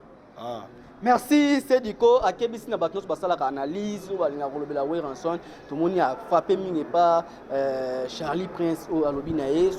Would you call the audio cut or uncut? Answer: uncut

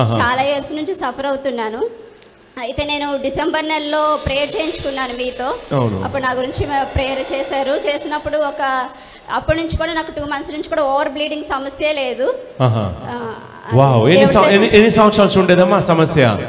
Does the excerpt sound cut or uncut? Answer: uncut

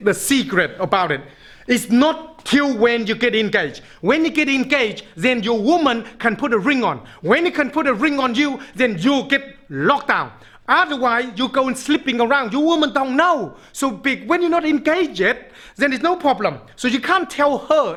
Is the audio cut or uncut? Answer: uncut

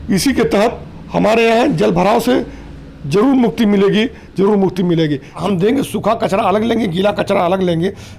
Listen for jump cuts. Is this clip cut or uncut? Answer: cut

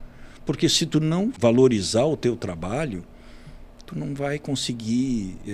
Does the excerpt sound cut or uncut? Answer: cut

